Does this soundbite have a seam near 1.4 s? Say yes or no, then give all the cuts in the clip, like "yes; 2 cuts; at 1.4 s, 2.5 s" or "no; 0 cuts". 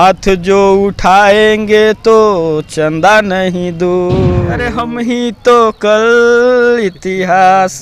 no; 1 cut; at 4.7 s